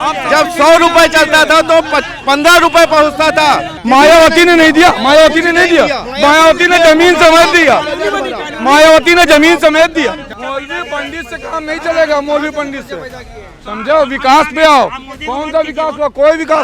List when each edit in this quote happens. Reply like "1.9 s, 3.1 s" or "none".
3.7 s, 10.3 s